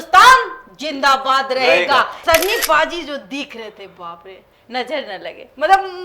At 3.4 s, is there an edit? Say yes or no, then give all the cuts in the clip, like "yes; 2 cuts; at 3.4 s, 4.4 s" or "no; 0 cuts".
no; 1 cut; at 2.2 s